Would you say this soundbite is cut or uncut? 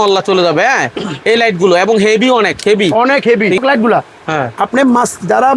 cut